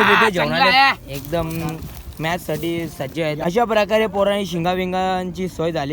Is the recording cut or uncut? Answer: cut